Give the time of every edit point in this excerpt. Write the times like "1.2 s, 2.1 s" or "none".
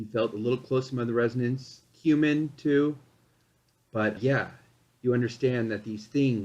4.2 s